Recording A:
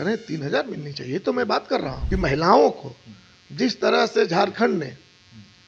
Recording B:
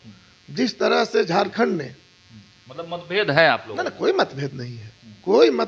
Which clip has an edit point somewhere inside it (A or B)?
A